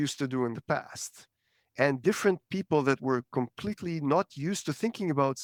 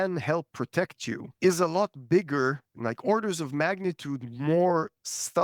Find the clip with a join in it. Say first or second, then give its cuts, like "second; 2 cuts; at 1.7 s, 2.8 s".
second; 2 cuts; at 1.3 s, 2.7 s